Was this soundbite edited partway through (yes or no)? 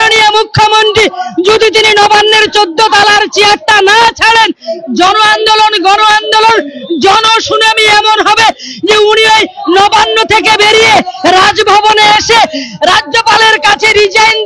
no